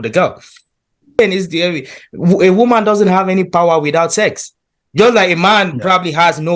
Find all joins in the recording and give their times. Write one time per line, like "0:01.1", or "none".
0:01.2